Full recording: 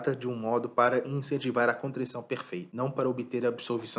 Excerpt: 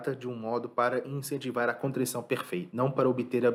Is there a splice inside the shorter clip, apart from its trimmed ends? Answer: no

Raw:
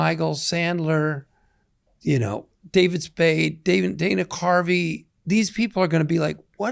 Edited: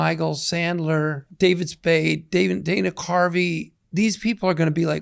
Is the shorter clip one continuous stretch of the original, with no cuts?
no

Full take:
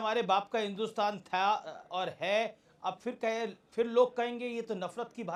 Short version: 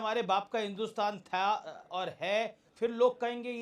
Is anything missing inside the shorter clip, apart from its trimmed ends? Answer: yes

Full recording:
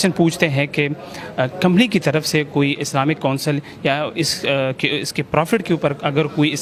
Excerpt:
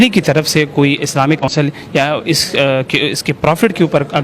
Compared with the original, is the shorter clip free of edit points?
no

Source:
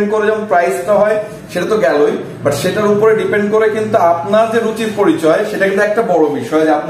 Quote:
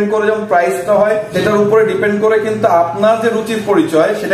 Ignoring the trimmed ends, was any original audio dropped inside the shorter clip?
yes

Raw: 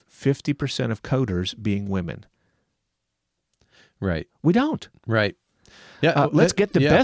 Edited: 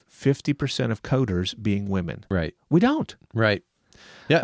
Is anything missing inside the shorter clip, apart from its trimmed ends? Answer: yes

